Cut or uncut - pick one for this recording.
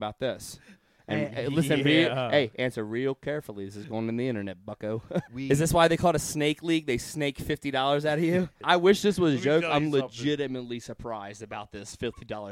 cut